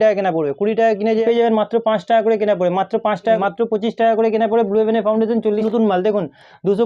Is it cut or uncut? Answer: cut